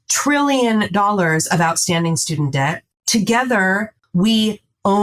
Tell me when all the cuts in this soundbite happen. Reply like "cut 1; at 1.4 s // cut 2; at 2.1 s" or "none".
cut 1; at 2.9 s // cut 2; at 4.0 s